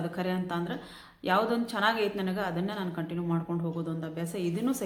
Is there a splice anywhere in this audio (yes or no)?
no